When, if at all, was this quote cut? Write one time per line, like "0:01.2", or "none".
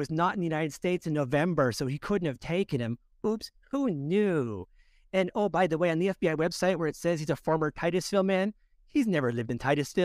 none